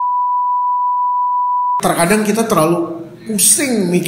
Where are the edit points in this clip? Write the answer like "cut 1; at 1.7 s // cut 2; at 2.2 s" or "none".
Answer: cut 1; at 1.8 s